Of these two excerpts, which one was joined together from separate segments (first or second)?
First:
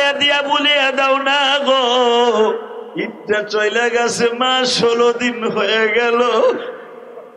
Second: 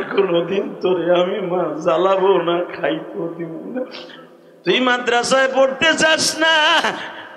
first